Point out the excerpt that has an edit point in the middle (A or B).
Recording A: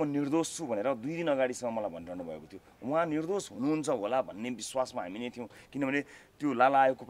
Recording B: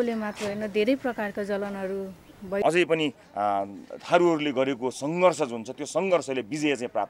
B